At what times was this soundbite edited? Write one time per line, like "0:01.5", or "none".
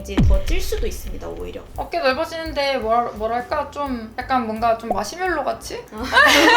0:01.6